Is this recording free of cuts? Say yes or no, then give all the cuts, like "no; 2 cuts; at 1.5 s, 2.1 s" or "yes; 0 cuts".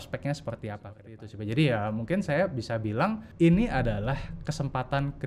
no; 2 cuts; at 1.1 s, 3.2 s